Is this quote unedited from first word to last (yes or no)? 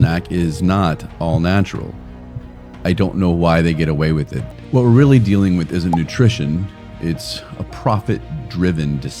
no